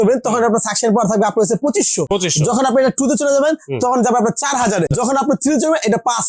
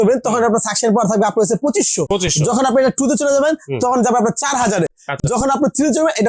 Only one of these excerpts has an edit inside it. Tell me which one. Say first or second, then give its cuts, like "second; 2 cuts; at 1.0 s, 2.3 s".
first; 1 cut; at 5.1 s